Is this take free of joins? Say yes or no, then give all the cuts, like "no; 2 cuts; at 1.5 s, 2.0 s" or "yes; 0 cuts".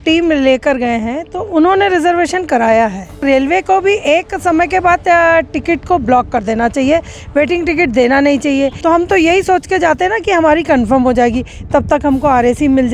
no; 2 cuts; at 3.2 s, 8.8 s